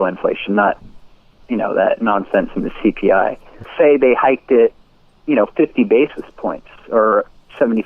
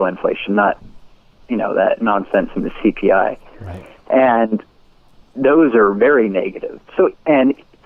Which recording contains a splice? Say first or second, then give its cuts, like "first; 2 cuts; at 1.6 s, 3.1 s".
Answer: first; 1 cut; at 3.7 s